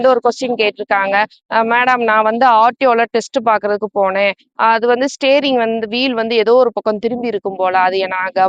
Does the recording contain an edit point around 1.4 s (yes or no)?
yes